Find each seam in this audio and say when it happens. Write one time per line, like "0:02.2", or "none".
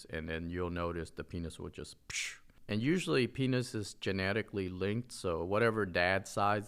0:02.4